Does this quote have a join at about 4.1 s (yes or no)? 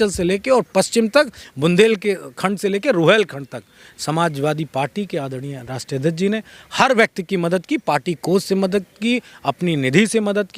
no